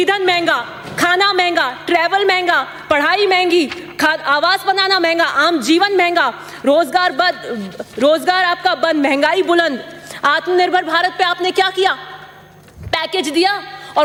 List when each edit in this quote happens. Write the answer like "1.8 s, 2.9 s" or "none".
none